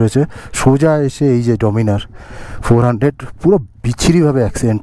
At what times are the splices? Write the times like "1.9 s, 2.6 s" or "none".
none